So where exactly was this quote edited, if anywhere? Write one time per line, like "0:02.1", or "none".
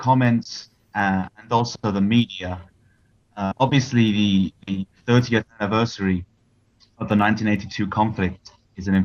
0:02.6